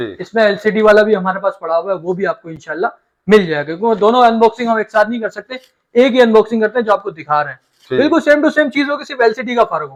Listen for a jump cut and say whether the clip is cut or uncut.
uncut